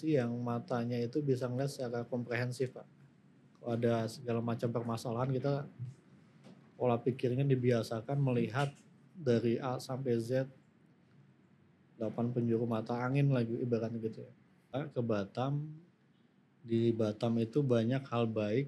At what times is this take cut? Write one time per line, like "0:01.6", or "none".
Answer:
0:14.8